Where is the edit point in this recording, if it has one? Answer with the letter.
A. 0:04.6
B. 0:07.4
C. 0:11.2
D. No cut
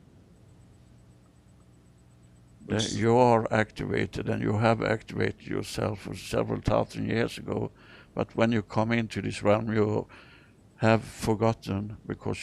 C